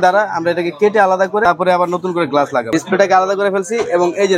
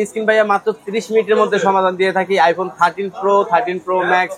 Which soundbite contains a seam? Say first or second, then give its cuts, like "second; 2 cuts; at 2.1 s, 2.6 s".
first; 2 cuts; at 1.4 s, 2.7 s